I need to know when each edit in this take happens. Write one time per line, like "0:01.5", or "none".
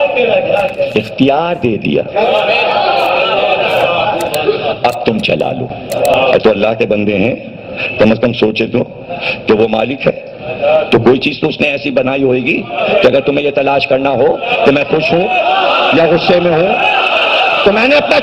0:06.2